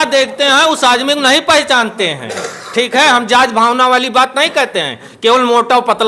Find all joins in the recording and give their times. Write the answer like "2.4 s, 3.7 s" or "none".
none